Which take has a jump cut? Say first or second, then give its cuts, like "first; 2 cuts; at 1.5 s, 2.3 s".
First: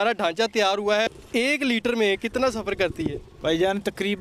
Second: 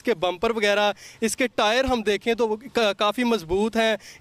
first; 1 cut; at 1.2 s